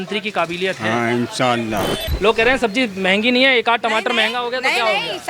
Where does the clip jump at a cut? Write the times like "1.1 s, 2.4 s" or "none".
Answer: 2.0 s